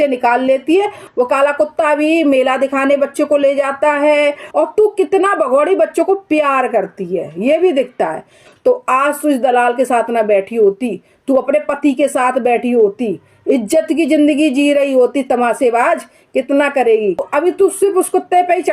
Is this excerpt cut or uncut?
cut